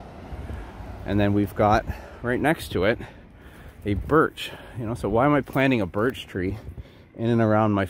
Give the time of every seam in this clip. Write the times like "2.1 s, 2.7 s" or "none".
none

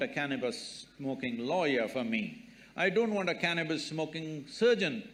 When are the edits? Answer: none

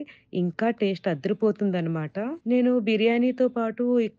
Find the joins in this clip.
2.3 s

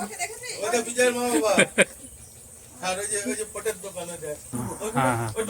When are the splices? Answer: 4.6 s

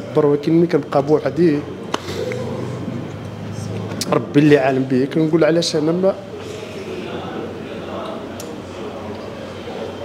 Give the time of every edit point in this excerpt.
none

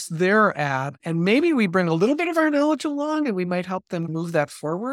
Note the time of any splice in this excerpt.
1.0 s, 4.1 s

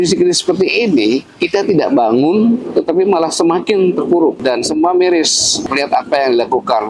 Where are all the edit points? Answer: 4.4 s, 5.6 s

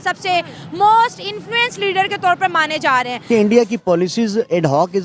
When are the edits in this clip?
3.2 s

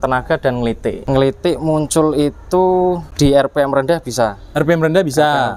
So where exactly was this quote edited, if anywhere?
0.9 s, 3.1 s

